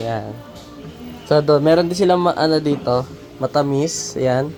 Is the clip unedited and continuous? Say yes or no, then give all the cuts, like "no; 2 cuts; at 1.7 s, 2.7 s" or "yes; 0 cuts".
yes; 0 cuts